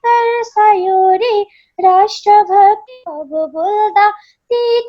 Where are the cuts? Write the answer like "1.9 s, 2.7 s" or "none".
none